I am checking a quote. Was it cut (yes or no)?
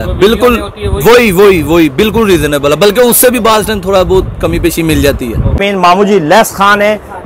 yes